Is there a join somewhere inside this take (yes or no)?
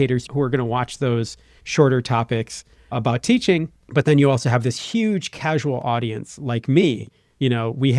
no